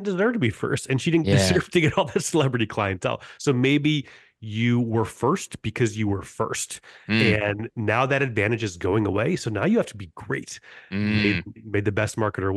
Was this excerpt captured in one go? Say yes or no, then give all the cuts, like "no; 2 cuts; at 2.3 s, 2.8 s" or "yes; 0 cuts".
yes; 0 cuts